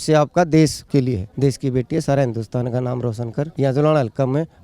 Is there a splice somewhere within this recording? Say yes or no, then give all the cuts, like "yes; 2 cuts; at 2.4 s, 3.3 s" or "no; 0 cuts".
yes; 2 cuts; at 1.0 s, 3.5 s